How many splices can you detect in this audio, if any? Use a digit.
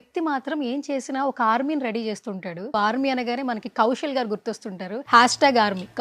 2